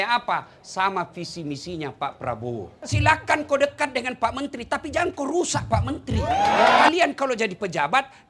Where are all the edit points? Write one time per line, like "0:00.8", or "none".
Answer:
0:02.8
0:06.9